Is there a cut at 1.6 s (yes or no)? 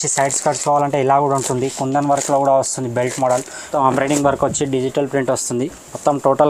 no